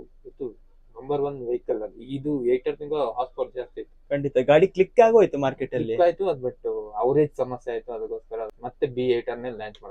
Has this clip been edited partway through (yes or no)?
yes